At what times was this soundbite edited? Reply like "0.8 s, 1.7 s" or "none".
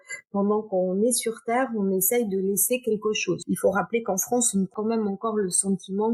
3.4 s, 4.7 s